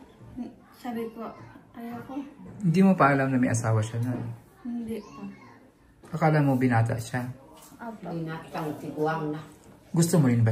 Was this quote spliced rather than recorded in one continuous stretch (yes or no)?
no